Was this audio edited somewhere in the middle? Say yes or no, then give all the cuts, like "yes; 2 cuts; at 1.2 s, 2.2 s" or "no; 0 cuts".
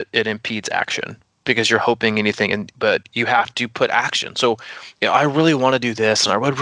no; 0 cuts